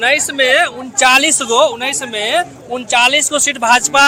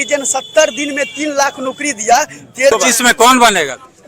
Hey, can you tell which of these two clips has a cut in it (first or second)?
second